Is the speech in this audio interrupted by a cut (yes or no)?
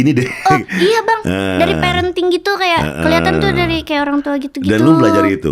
no